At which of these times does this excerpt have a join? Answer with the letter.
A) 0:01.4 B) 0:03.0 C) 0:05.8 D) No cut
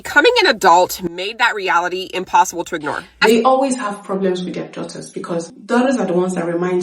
B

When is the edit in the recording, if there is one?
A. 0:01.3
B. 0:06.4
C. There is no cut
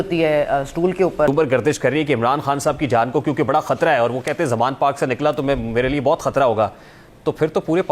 A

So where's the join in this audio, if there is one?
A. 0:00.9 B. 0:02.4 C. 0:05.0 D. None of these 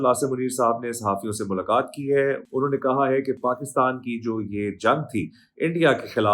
B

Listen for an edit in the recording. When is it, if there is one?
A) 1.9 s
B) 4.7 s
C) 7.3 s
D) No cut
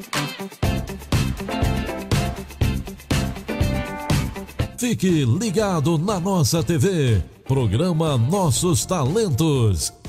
B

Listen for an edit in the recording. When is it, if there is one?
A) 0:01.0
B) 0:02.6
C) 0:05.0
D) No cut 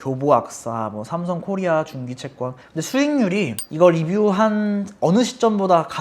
B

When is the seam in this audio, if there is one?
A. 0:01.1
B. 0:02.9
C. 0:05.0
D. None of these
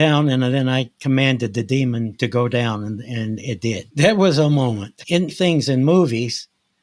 C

